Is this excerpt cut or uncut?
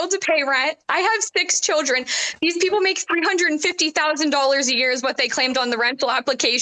uncut